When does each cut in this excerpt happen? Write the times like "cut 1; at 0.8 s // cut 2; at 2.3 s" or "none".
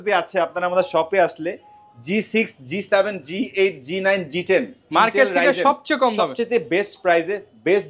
none